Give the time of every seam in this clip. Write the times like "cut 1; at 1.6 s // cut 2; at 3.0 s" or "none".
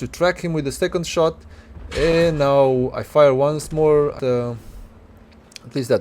cut 1; at 4.2 s

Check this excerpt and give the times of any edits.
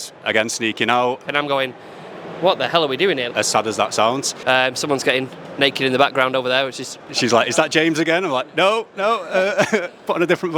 cut 1; at 1.3 s // cut 2; at 3.3 s // cut 3; at 4.3 s // cut 4; at 6.9 s

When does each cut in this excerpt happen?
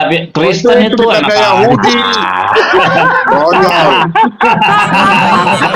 none

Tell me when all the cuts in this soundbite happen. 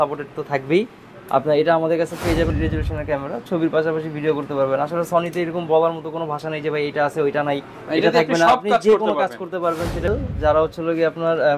cut 1; at 2.5 s // cut 2; at 10.1 s

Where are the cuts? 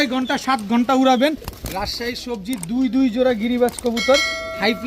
cut 1; at 1.5 s

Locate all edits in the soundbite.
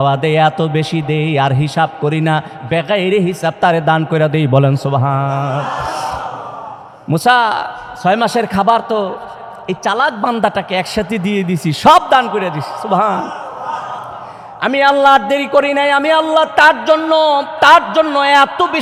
none

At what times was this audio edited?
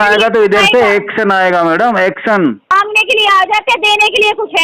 cut 1; at 2.7 s

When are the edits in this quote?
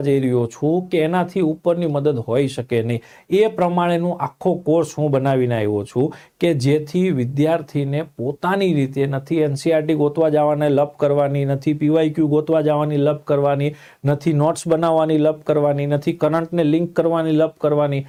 none

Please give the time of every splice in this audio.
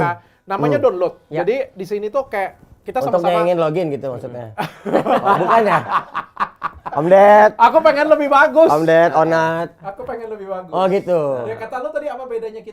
none

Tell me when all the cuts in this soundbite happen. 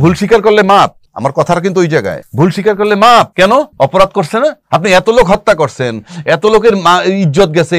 cut 1; at 1.0 s // cut 2; at 2.2 s // cut 3; at 3.6 s // cut 4; at 4.6 s

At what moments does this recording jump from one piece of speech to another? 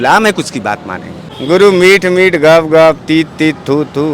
cut 1; at 1.2 s

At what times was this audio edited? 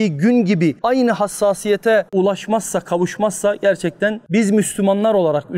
cut 1; at 4.2 s

